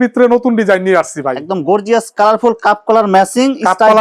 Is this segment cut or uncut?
uncut